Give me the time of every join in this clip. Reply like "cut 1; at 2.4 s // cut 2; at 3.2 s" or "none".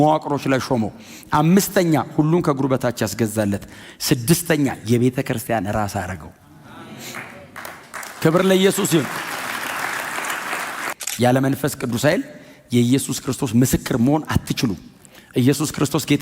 cut 1; at 11.0 s

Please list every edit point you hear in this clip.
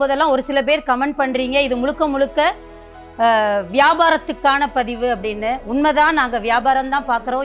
none

